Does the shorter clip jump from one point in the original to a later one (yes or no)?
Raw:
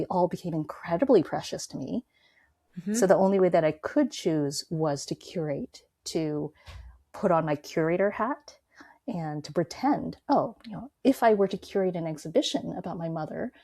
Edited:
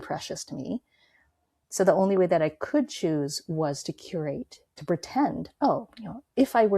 yes